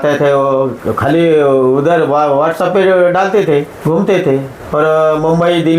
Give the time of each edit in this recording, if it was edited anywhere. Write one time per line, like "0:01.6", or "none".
0:03.7
0:04.6